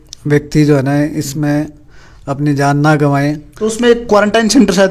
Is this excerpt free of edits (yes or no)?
yes